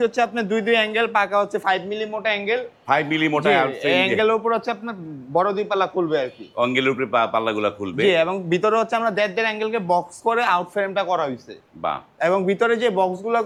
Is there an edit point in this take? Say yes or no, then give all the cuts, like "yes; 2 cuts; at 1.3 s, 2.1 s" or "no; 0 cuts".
no; 0 cuts